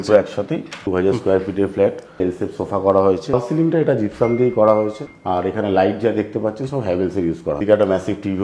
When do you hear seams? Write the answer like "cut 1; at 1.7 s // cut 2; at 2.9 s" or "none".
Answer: cut 1; at 0.8 s // cut 2; at 2.2 s // cut 3; at 3.3 s // cut 4; at 5.1 s // cut 5; at 7.6 s